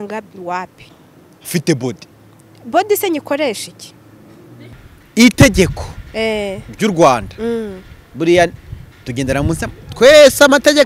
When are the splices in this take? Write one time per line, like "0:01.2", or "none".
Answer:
0:04.8